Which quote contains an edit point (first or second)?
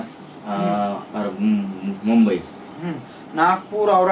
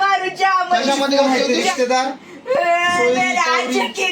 second